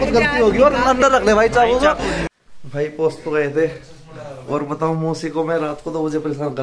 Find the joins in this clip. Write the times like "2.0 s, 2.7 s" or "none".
2.2 s